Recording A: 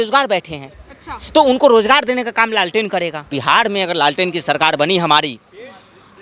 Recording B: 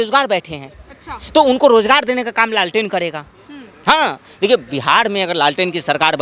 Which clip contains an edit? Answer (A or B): A